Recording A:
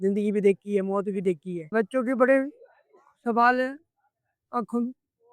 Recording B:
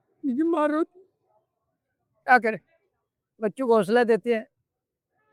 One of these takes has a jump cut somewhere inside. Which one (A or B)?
A